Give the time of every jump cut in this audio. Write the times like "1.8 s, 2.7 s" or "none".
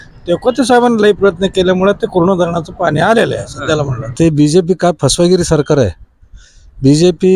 4.1 s